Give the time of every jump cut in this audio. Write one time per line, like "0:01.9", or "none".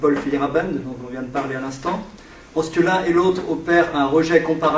0:02.6